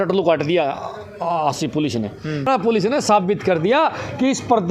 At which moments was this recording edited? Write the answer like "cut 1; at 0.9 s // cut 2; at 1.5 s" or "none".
cut 1; at 2.5 s